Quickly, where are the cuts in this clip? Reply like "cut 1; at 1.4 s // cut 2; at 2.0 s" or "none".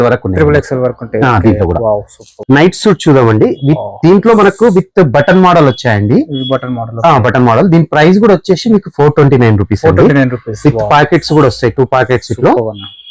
cut 1; at 2.3 s